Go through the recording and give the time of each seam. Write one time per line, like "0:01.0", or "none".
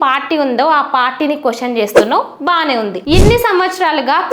0:03.0